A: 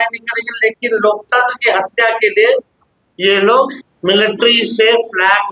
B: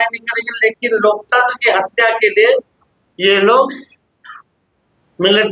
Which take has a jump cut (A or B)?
A